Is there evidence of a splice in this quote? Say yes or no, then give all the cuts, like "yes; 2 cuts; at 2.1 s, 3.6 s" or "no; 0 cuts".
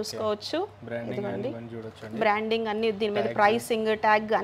no; 0 cuts